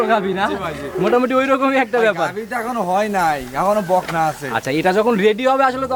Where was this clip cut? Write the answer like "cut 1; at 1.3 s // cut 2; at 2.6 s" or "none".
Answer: none